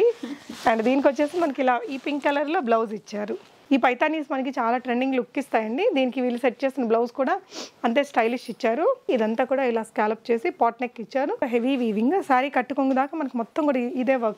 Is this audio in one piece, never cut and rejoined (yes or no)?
no